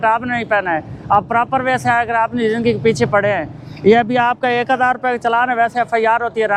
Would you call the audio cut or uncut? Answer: uncut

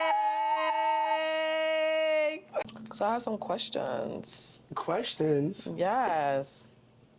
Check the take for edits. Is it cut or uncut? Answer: uncut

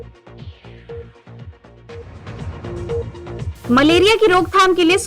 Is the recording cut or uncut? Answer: cut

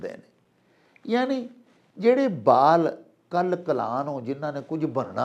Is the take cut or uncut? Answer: uncut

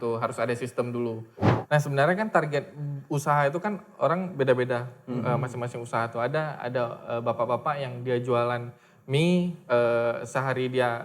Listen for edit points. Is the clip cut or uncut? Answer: cut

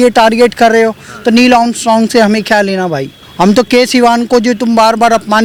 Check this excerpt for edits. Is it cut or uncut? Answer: uncut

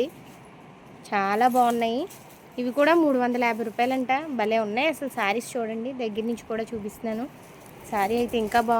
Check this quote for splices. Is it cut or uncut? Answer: uncut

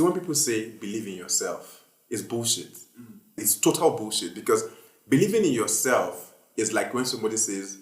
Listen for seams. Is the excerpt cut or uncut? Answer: cut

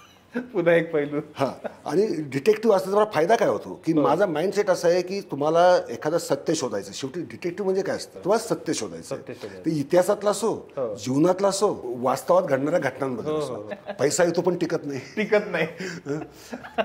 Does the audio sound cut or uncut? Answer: cut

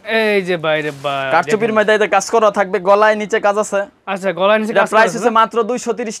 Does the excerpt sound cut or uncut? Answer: uncut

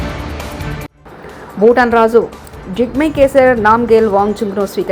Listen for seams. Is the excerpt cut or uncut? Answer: cut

